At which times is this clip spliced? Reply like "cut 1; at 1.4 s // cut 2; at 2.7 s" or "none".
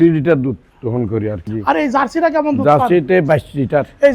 cut 1; at 1.5 s

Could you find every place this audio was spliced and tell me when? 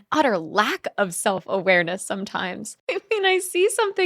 cut 1; at 2.8 s

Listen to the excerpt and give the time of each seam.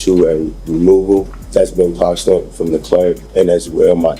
cut 1; at 1.4 s // cut 2; at 3.2 s

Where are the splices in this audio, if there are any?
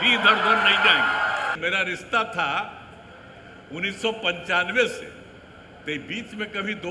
cut 1; at 1.6 s

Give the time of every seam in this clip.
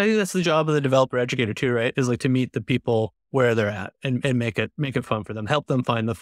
none

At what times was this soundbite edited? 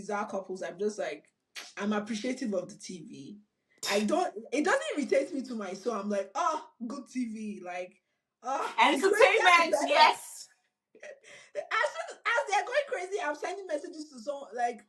none

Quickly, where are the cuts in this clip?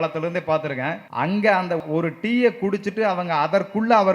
cut 1; at 1.0 s // cut 2; at 1.8 s

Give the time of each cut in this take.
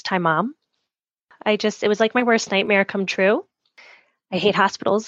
cut 1; at 1.3 s

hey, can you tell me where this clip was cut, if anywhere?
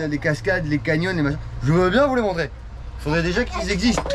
none

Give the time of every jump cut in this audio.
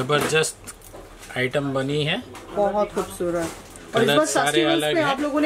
none

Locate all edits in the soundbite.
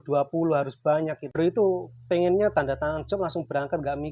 cut 1; at 1.4 s

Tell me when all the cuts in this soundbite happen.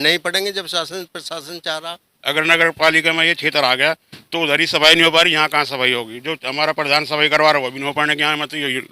cut 1; at 2.1 s

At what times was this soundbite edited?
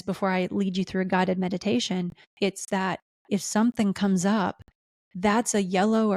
cut 1; at 2.2 s

